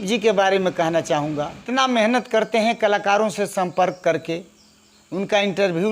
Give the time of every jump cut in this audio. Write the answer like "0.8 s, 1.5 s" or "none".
1.6 s